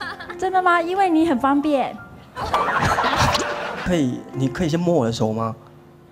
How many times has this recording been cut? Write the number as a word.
one